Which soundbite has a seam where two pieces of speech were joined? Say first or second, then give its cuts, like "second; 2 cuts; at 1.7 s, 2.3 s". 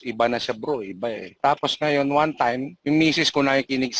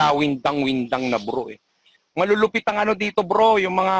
first; 2 cuts; at 1.4 s, 2.7 s